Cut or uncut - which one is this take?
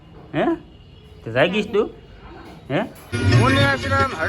cut